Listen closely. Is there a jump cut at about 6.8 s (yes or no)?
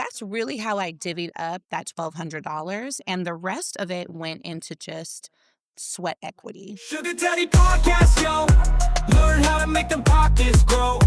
yes